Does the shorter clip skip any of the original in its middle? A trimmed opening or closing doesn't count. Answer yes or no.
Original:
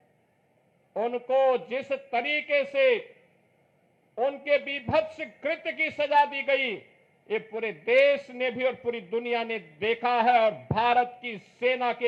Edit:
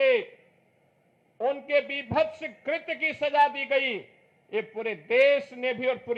no